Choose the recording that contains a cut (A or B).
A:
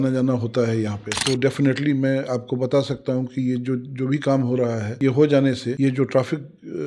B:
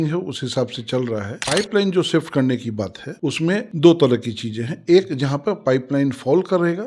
A